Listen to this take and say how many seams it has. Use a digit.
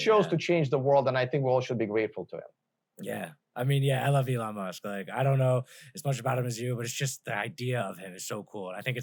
0